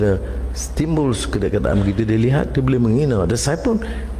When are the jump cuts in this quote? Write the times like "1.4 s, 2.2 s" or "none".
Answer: none